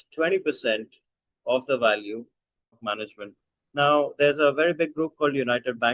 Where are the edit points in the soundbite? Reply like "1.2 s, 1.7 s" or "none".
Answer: 2.8 s